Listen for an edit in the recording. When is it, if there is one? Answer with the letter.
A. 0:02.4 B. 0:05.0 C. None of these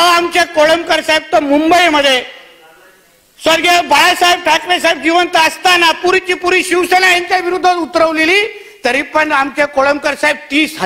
C